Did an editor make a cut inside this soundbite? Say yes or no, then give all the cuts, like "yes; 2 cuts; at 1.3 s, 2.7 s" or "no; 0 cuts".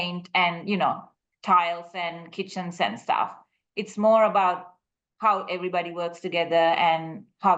no; 0 cuts